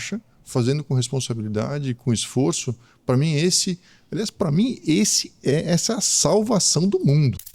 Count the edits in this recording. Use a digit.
0